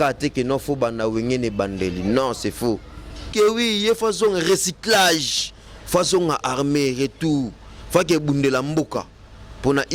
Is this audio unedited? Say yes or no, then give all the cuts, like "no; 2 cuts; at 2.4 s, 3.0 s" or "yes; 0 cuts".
no; 1 cut; at 3.2 s